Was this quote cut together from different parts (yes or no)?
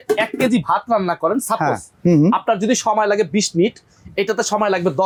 no